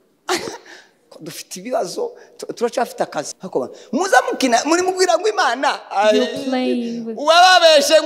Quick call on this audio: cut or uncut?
cut